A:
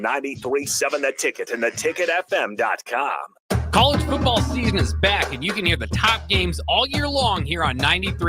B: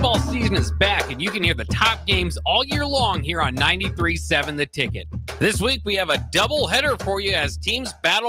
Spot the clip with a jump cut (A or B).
A